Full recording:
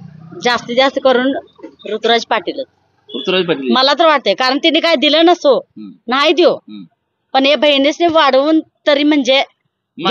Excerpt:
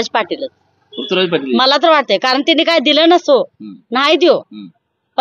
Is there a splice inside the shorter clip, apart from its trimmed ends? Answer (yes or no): no